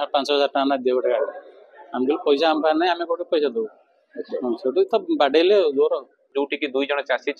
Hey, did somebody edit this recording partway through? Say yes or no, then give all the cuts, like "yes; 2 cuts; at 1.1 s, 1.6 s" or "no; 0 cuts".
yes; 1 cut; at 6.3 s